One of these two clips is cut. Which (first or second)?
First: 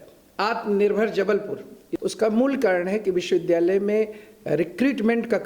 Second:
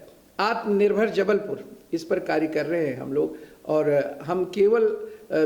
first